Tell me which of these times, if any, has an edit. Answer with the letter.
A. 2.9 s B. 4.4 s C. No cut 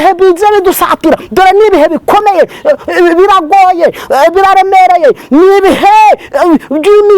C